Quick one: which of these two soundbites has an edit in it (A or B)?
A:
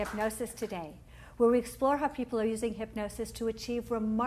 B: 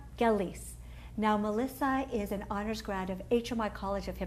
A